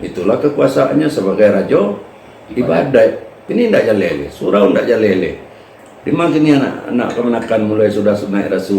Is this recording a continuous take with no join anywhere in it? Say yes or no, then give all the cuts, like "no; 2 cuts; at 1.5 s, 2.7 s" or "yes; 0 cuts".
no; 1 cut; at 3.3 s